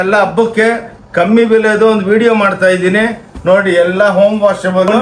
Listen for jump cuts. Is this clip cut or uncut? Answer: uncut